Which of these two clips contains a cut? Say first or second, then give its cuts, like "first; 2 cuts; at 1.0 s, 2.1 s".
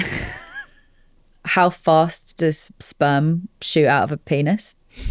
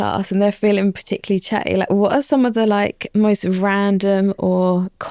first; 1 cut; at 1.4 s